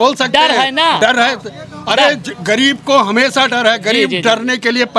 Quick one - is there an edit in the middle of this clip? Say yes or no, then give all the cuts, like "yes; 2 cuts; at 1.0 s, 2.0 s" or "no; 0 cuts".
no; 0 cuts